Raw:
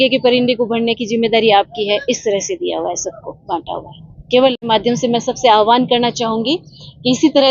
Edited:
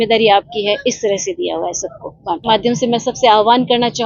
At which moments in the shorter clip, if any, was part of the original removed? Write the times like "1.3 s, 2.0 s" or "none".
2.4 s